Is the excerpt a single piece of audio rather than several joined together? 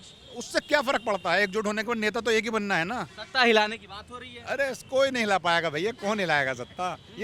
yes; 0 cuts

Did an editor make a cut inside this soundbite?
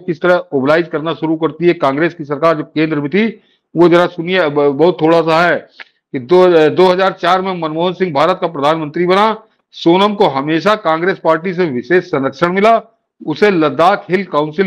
no; 0 cuts

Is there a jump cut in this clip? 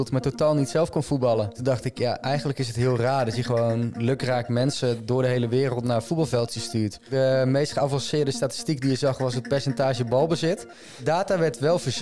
yes; 3 cuts; at 1.6 s, 7.0 s, 10.9 s

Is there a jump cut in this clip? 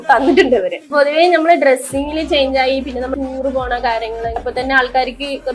yes; 3 cuts; at 0.9 s, 3.1 s, 4.4 s

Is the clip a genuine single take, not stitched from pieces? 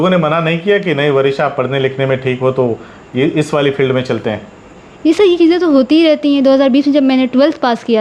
yes; 0 cuts

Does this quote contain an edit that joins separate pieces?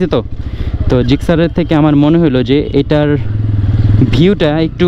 no; 0 cuts

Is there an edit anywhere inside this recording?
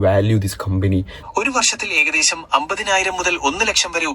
yes; 1 cut; at 1.1 s

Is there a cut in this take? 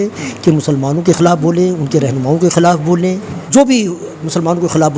yes; 1 cut; at 3.3 s

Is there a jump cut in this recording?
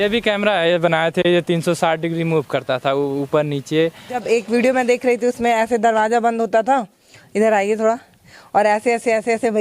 yes; 1 cut; at 4.2 s

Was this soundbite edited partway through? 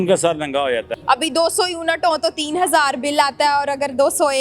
yes; 1 cut; at 0.9 s

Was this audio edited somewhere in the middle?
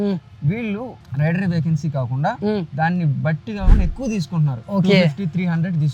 no; 0 cuts

